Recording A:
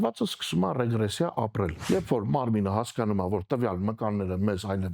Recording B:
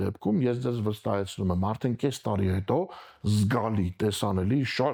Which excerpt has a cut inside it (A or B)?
A